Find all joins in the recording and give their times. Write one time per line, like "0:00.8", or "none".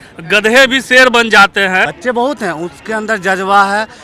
0:01.9